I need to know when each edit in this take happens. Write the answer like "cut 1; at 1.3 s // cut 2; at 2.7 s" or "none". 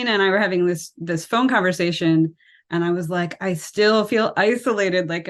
none